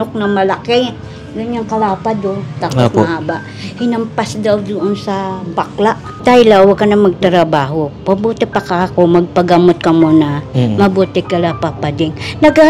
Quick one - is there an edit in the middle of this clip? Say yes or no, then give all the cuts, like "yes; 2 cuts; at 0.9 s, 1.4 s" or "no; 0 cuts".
yes; 1 cut; at 6.1 s